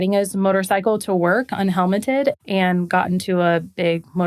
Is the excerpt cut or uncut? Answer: cut